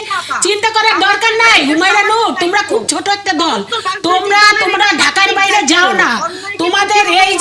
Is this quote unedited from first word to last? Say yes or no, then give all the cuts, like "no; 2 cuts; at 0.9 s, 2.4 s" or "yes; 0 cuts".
yes; 0 cuts